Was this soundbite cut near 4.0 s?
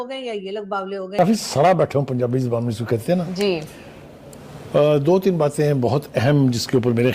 no; 1 cut; at 1.2 s

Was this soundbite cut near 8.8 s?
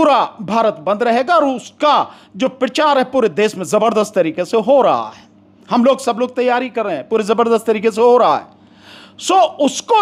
no; 0 cuts

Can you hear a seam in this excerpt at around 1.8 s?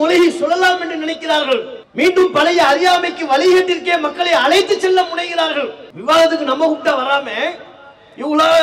yes; 2 cuts; at 1.8 s, 5.9 s

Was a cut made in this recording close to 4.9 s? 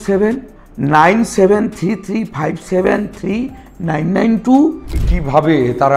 yes; 1 cut; at 4.9 s

